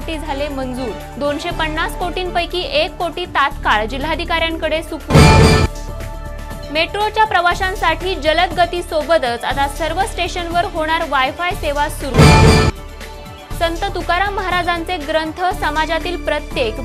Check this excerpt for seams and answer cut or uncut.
uncut